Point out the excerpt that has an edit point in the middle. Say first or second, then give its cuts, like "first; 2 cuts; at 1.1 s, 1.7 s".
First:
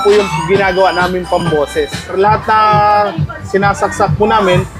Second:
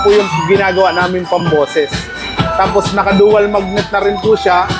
first; 1 cut; at 2.1 s